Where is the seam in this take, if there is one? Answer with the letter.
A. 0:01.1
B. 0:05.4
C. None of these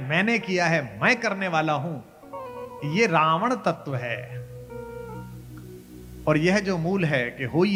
C